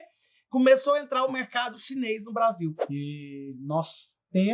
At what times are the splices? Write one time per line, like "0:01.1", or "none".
0:02.8